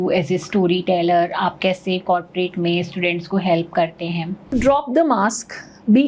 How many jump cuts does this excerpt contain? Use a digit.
1